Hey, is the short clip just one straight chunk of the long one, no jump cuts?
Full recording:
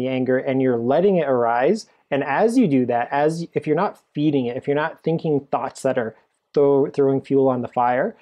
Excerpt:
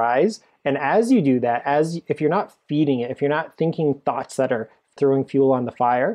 no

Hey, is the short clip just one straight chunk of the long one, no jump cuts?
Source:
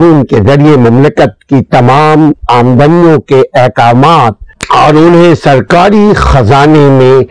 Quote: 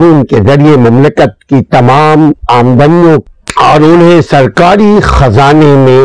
no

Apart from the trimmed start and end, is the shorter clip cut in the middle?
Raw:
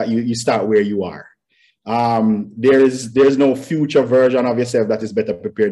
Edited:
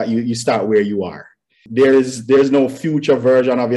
yes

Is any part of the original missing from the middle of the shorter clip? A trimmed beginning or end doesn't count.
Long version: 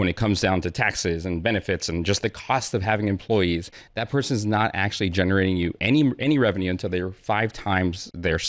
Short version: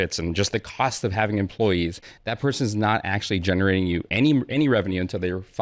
no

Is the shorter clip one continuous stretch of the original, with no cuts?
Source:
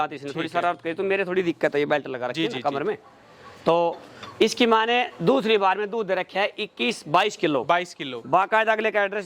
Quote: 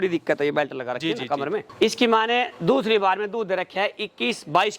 no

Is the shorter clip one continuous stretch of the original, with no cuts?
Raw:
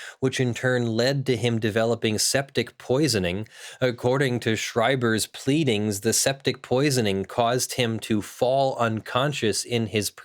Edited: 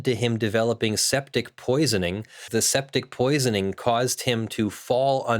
no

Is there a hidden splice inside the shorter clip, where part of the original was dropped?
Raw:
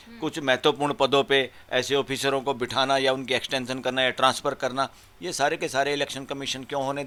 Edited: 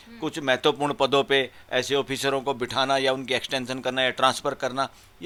no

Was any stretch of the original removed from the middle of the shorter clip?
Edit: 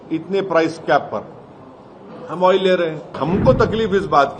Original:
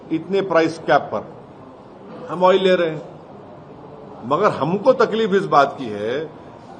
yes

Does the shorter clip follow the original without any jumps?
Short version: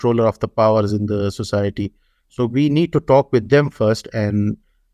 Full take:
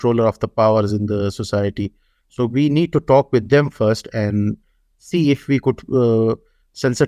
yes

